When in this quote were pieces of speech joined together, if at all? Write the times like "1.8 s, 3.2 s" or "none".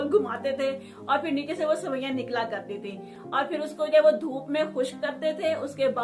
none